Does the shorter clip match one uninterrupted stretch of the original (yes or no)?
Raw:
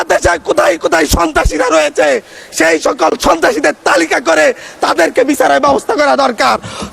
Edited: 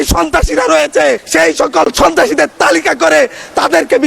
no